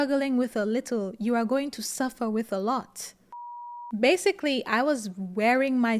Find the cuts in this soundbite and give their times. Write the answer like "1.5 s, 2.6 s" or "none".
3.7 s

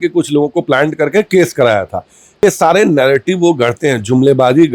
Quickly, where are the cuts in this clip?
2.4 s

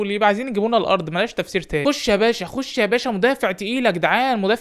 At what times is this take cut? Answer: 1.8 s

